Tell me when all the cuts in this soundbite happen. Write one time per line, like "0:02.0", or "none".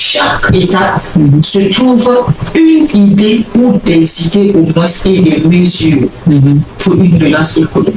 none